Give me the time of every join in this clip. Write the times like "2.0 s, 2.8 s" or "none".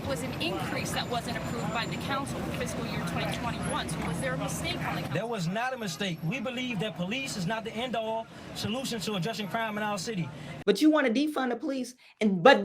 10.5 s